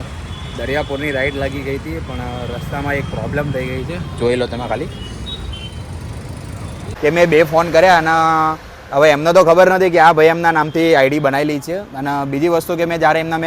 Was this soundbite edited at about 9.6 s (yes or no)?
no